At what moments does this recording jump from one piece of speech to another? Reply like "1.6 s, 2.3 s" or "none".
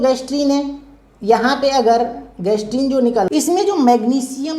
3.3 s